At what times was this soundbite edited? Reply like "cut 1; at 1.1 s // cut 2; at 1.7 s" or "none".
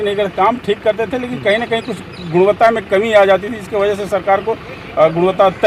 none